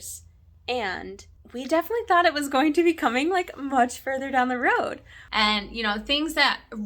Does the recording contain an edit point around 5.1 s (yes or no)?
yes